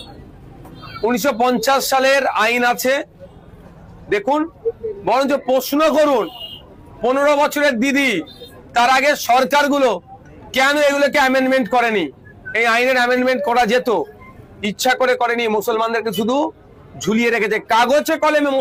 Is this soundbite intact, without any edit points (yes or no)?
yes